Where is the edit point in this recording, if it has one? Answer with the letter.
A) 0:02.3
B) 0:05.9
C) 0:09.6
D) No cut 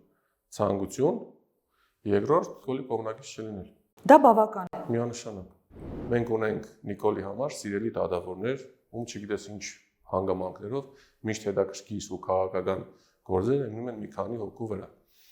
B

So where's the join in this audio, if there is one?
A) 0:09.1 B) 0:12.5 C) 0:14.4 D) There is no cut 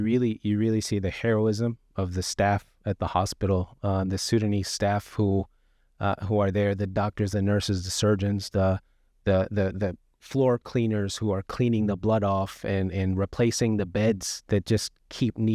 C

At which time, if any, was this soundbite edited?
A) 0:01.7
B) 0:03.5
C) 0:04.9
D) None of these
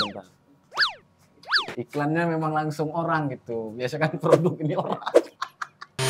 A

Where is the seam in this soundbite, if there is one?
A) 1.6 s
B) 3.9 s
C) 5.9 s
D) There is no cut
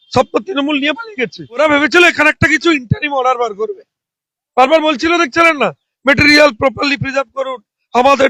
A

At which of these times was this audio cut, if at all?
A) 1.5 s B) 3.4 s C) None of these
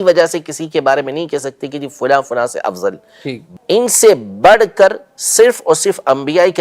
B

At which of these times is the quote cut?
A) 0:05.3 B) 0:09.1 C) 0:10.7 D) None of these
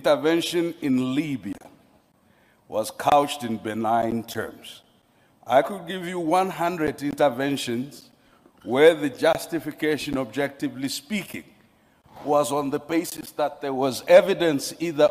D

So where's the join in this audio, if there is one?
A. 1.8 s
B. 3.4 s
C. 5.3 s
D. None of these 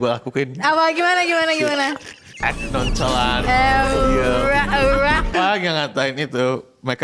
C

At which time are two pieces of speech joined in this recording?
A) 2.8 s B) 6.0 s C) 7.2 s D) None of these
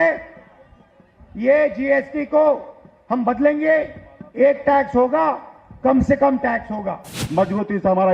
C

